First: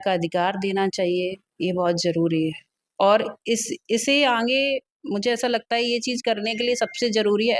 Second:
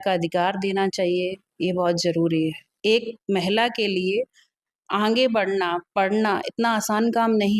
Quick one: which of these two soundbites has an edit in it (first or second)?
second